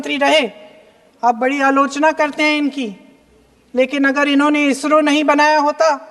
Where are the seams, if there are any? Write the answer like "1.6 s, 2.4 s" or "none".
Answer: none